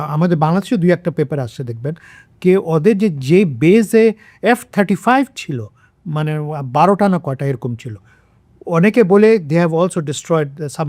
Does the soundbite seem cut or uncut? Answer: uncut